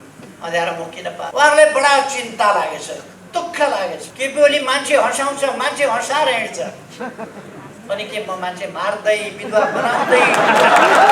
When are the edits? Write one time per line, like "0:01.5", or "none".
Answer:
0:01.3
0:04.1